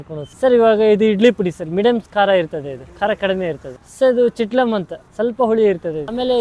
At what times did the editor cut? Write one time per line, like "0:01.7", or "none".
none